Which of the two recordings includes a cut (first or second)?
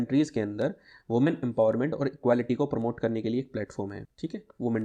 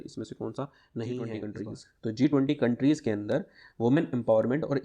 second